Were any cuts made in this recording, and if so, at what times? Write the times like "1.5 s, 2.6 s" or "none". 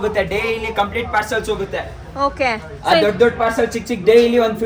none